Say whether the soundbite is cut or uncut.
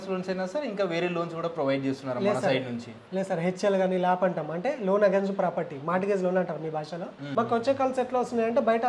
cut